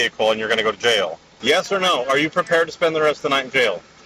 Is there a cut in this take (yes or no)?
yes